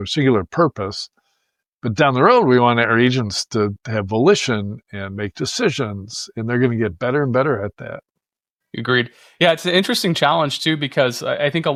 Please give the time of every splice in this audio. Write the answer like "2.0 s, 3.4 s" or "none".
none